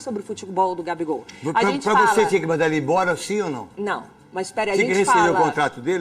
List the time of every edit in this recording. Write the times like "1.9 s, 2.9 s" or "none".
none